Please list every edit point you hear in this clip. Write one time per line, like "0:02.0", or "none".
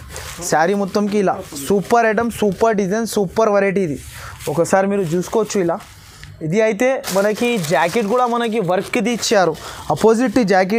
none